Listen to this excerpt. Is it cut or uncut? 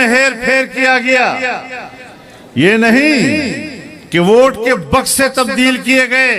uncut